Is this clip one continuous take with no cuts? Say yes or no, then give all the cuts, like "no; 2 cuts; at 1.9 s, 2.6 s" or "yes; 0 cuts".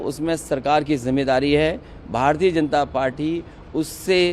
yes; 0 cuts